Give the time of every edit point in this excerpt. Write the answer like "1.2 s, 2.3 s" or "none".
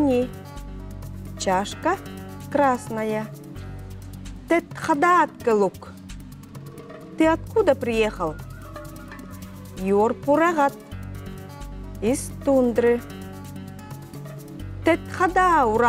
13.2 s, 14.8 s